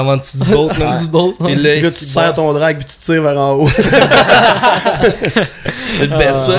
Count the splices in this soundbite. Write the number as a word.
zero